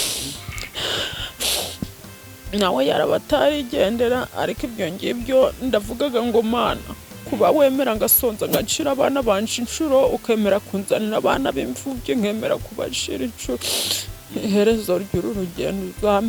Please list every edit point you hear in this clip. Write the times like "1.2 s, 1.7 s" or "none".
none